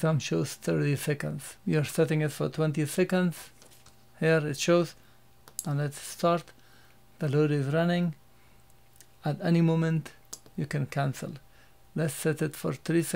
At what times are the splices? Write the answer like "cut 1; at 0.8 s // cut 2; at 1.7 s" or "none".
cut 1; at 1.5 s